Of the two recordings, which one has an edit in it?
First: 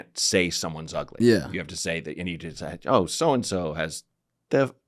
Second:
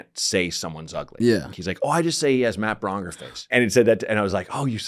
second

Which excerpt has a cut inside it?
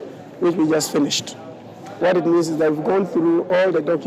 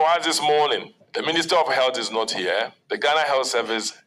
second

